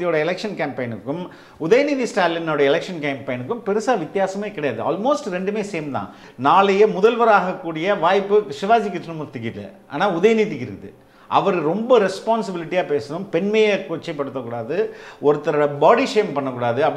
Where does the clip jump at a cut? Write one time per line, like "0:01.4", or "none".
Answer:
0:06.2